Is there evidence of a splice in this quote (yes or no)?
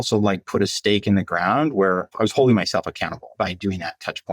yes